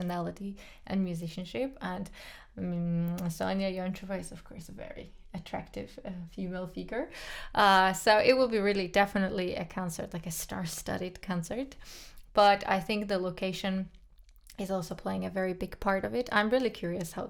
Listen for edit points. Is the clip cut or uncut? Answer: uncut